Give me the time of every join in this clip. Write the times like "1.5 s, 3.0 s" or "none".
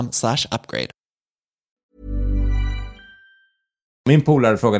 1.7 s, 4.0 s